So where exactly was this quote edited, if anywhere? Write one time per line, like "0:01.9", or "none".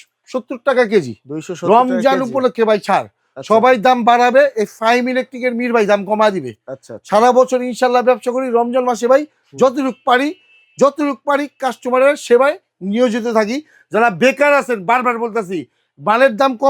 none